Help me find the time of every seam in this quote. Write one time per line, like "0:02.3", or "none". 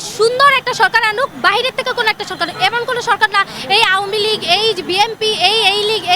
none